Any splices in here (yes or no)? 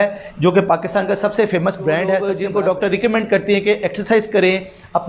yes